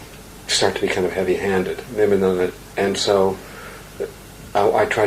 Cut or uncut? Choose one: cut